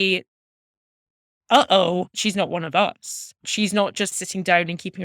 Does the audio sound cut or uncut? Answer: cut